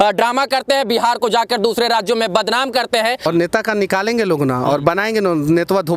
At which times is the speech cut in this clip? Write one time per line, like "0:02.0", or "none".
0:03.3